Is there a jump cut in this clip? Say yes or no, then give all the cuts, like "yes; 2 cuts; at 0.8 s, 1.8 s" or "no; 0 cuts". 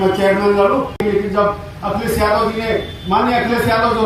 yes; 1 cut; at 1.0 s